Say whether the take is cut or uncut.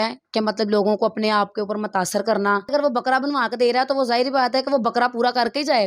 cut